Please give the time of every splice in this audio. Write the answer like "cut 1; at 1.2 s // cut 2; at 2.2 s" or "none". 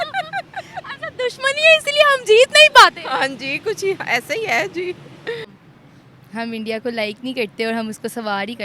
cut 1; at 5.6 s